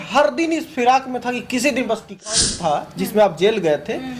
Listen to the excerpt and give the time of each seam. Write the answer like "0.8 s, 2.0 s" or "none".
2.4 s